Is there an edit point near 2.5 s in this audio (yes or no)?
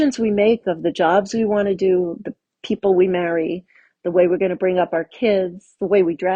no